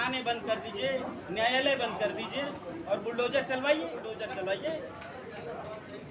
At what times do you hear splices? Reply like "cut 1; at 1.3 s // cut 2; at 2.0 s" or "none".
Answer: cut 1; at 4.1 s